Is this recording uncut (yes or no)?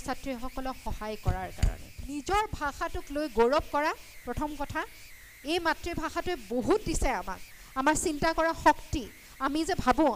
no